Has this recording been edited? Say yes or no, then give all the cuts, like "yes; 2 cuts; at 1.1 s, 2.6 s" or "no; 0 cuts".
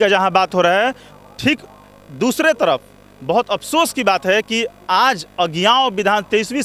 no; 0 cuts